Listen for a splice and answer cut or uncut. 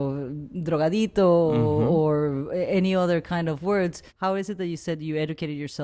cut